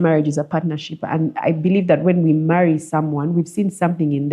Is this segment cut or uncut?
uncut